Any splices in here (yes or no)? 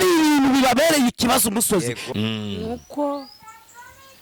yes